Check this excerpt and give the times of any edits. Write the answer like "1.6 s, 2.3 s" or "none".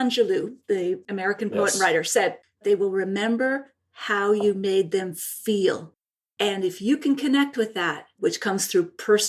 2.6 s, 6.3 s, 8.2 s